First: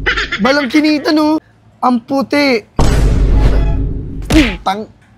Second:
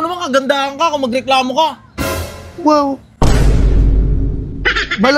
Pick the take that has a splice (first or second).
first